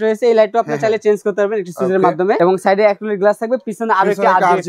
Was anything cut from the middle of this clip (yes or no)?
yes